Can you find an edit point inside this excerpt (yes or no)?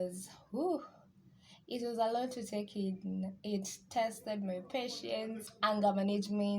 yes